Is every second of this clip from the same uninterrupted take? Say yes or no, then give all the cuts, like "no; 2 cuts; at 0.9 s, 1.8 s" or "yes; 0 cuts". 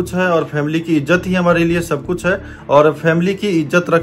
yes; 0 cuts